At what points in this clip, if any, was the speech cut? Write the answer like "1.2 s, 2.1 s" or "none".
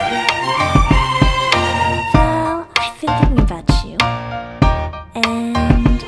2.0 s